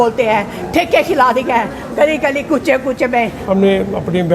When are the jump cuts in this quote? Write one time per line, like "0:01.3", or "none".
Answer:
0:03.4